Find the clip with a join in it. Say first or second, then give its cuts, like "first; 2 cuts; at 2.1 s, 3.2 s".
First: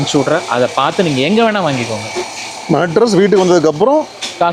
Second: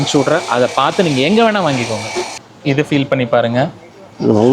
second; 1 cut; at 2.5 s